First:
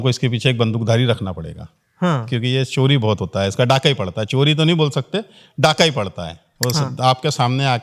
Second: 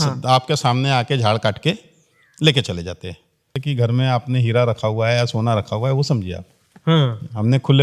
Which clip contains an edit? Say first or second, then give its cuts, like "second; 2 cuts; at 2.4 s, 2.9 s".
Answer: second; 1 cut; at 3.6 s